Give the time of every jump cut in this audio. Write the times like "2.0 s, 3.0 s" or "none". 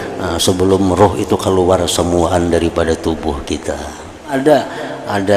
4.3 s